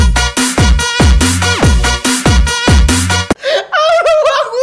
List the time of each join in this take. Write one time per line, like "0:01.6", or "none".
none